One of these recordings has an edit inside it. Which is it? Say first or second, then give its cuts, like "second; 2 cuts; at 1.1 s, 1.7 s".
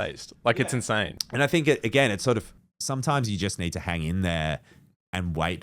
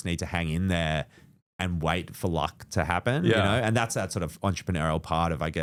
first; 1 cut; at 1.2 s